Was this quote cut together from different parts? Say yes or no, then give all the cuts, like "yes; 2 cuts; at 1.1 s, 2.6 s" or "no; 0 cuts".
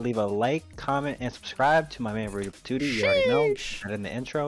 no; 0 cuts